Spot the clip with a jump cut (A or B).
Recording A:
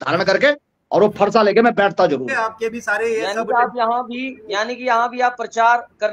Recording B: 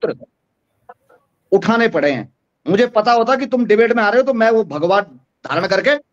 A